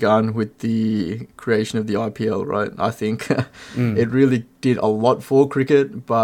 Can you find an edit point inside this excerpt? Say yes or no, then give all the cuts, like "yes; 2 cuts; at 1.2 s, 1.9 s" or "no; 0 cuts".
no; 0 cuts